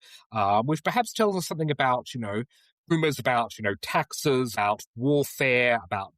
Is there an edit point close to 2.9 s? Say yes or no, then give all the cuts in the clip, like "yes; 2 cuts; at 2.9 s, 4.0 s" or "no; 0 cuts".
yes; 2 cuts; at 2.9 s, 4.5 s